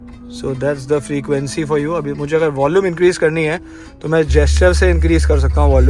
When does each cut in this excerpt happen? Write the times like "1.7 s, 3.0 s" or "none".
none